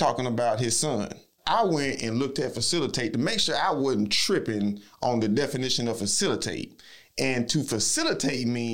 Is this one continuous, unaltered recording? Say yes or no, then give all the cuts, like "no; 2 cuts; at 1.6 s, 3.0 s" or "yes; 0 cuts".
no; 1 cut; at 1.3 s